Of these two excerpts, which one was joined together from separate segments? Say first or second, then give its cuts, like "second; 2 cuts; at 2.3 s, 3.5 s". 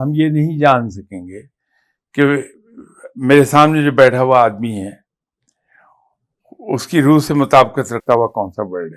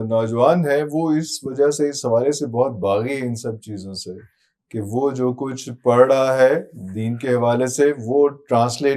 first; 1 cut; at 8.0 s